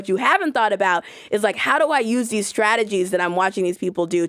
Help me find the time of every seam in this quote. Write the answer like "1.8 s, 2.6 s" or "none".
none